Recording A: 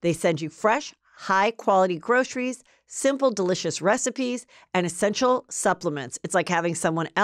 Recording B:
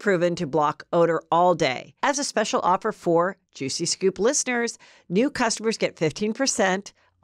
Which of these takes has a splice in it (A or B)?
B